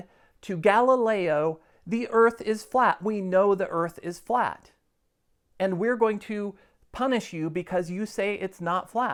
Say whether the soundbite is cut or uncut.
uncut